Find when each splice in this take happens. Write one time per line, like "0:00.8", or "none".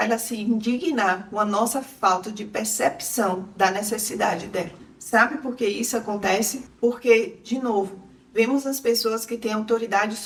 none